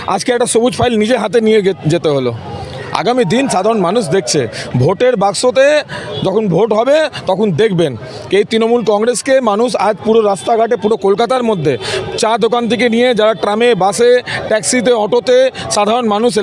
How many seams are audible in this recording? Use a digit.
0